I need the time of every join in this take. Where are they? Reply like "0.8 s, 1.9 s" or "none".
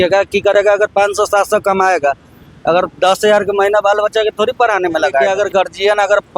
5.3 s